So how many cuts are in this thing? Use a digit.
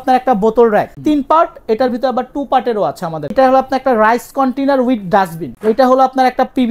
3